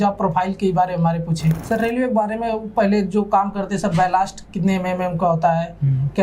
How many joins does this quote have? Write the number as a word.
one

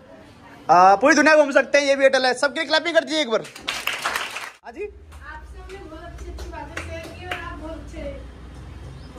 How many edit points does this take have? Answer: one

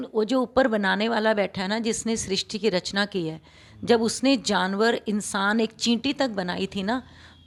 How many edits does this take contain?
zero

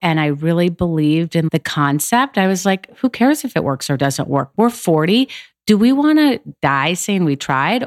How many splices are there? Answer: one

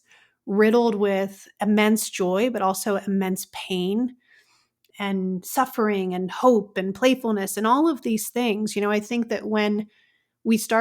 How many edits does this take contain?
one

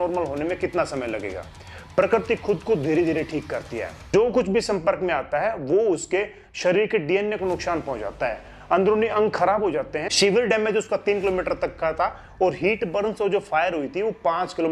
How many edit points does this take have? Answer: one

